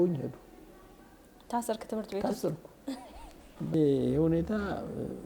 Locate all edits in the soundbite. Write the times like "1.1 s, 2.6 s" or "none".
3.7 s